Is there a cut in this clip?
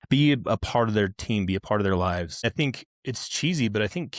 yes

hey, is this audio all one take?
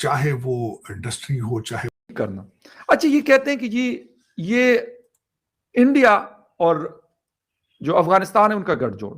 no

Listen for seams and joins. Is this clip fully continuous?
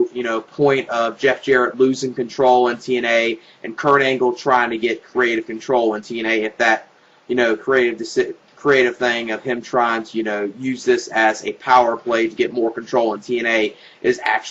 no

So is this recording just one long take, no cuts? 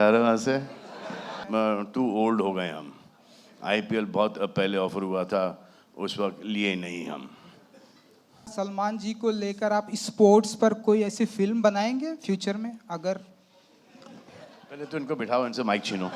no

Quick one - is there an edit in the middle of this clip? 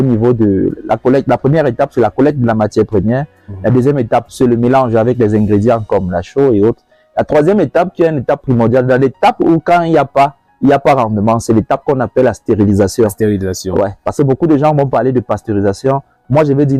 no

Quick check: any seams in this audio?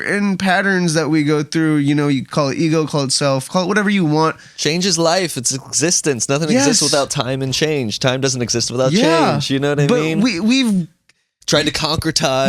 no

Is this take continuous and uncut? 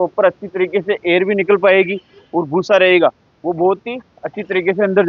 yes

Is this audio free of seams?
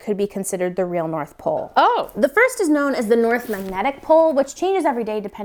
yes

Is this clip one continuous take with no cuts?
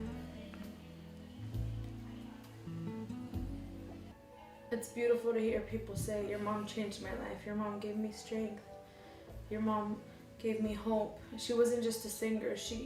no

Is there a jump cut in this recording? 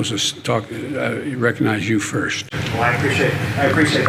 no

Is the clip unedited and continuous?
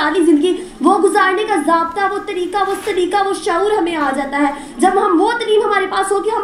yes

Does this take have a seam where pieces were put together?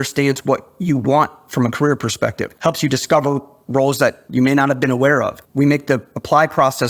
yes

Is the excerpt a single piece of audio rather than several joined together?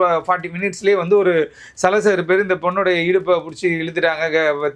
yes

